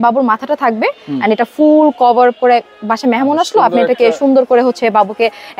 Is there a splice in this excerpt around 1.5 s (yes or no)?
no